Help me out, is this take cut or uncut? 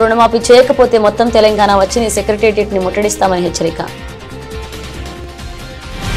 cut